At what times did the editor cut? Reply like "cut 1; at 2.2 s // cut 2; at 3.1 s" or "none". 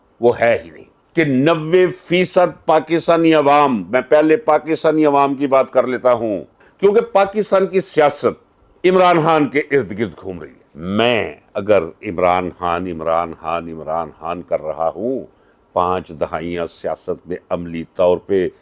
cut 1; at 1.0 s // cut 2; at 6.6 s // cut 3; at 10.6 s